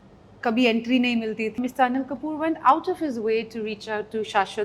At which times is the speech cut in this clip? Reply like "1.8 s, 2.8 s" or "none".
1.5 s